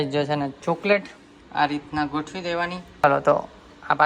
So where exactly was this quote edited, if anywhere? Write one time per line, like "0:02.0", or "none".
none